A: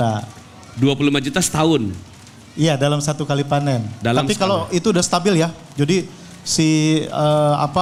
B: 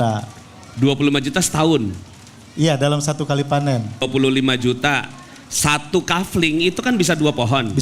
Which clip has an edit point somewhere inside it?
B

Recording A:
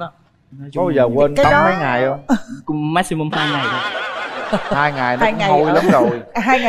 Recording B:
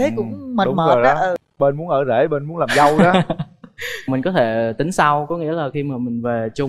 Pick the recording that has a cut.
B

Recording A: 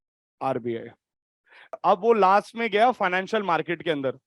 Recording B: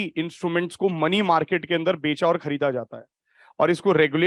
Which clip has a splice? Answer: A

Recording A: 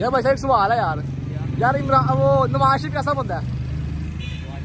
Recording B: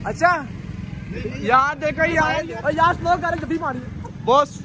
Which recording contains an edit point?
B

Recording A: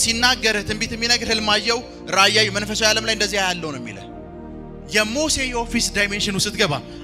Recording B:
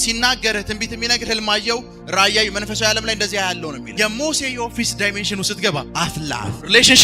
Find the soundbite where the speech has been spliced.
B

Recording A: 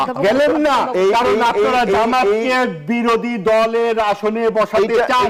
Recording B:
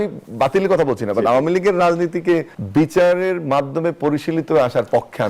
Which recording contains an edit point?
B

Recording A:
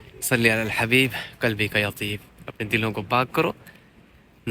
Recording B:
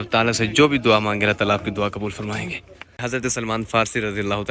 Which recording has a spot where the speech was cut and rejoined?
B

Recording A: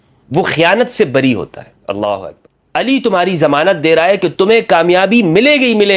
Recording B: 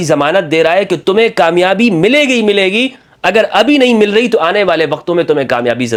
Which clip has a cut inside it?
A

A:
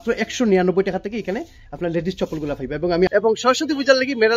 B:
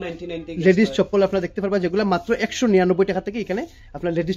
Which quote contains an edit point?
A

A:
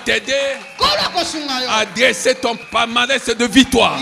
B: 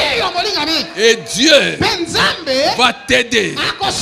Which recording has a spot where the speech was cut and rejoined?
A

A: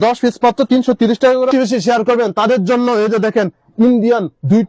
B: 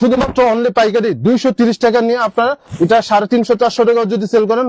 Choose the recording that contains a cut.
A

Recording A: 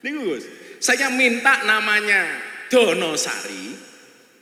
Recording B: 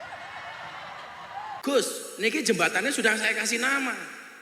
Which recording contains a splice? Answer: B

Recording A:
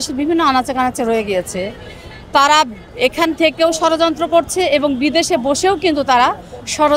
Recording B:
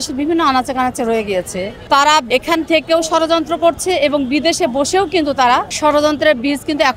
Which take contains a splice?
B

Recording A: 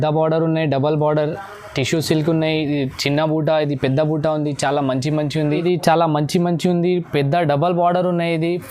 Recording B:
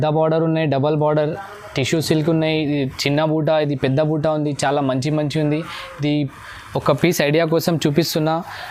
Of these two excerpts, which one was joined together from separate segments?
A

